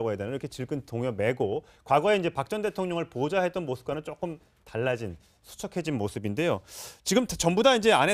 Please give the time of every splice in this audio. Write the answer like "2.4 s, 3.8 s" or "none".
2.3 s